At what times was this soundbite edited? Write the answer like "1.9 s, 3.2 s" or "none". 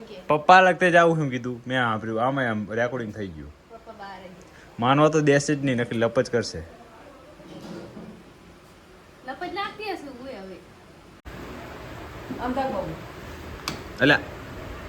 11.2 s